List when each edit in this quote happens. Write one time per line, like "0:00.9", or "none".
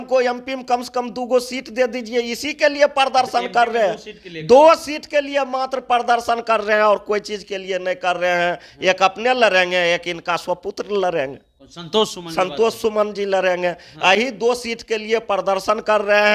none